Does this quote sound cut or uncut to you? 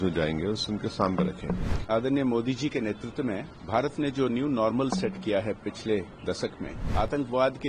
cut